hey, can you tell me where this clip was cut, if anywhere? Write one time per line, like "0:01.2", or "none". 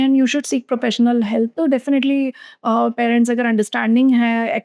none

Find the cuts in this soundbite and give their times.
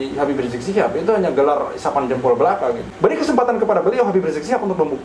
0:02.9

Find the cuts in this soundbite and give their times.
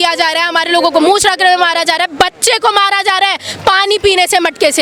none

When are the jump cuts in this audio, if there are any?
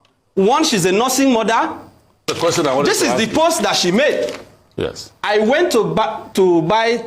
0:02.3

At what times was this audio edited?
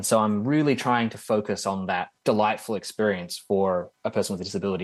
0:02.1

